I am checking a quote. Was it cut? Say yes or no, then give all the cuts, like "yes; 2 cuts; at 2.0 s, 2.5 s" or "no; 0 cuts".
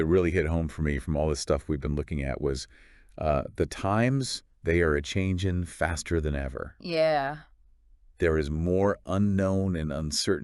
no; 0 cuts